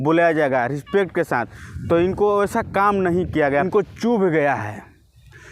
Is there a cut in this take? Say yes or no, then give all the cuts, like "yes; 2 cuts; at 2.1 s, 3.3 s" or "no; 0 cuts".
yes; 1 cut; at 3.7 s